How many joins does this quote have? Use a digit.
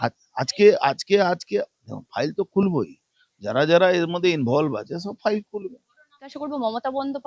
1